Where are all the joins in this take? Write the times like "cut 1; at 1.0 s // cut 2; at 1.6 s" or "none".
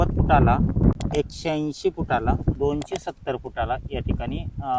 cut 1; at 0.9 s // cut 2; at 2.6 s